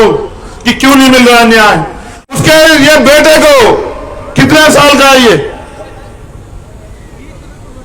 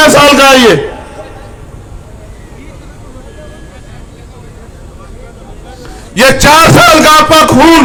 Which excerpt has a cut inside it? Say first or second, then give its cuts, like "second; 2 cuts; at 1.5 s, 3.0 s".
first; 1 cut; at 2.3 s